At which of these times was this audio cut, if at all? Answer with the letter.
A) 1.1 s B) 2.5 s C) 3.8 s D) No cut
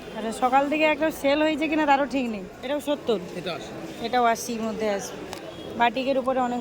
B